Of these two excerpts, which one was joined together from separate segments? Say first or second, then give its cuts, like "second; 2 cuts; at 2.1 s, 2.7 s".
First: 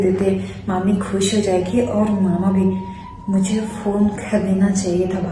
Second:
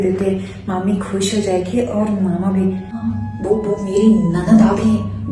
second; 1 cut; at 3.1 s